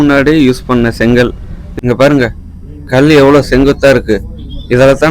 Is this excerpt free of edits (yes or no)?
no